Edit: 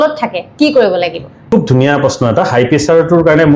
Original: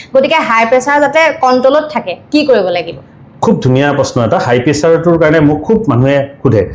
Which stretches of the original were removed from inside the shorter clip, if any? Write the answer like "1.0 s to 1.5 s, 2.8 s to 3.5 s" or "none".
3.0 s to 3.3 s